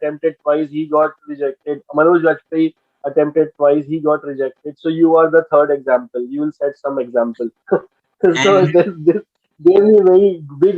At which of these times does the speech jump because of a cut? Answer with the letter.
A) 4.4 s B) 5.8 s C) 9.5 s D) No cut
D